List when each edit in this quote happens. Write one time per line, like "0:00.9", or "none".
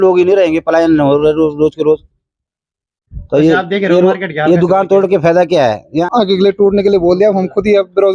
0:05.8